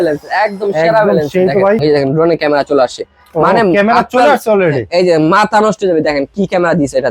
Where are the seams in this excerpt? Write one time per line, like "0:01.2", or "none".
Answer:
0:01.8